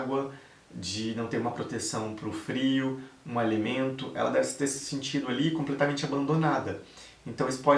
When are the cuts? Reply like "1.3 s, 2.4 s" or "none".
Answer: none